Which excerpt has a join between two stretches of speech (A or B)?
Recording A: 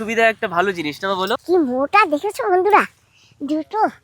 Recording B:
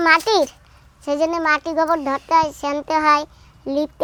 A